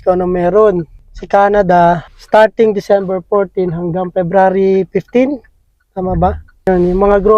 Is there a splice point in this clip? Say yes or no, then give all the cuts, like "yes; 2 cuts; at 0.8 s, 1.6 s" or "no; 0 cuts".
no; 0 cuts